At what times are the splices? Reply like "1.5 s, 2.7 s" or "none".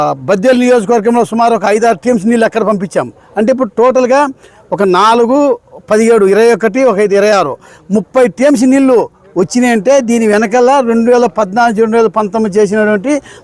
none

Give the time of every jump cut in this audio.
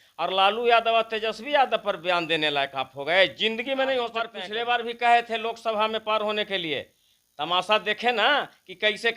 4.4 s

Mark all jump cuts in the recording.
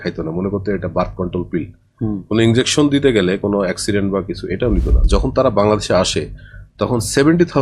5.0 s

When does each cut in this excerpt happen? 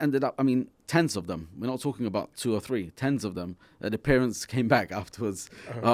none

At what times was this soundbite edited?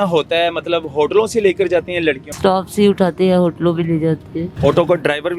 2.4 s, 4.4 s

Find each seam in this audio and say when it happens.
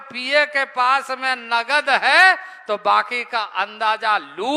none

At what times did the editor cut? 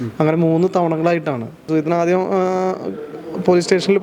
1.6 s

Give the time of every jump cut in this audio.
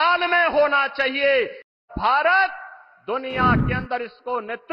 1.8 s

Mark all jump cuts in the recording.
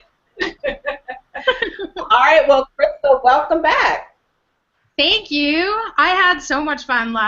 4.9 s

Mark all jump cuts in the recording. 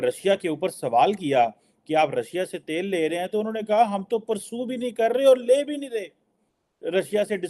none

